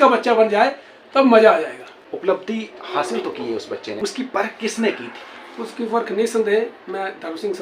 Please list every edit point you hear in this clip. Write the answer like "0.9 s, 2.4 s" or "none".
1.9 s, 4.0 s